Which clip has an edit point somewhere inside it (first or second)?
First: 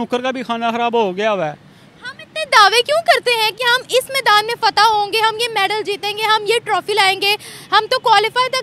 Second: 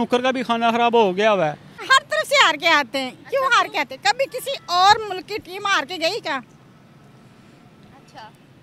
second